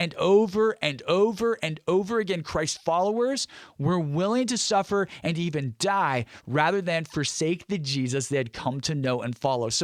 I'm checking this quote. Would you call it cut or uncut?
uncut